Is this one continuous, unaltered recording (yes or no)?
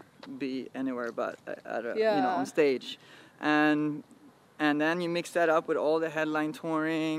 yes